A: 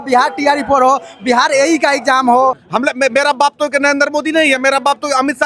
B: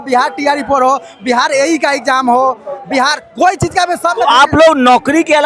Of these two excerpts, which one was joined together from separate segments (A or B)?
A